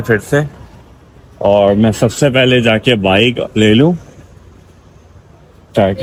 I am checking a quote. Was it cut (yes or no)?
no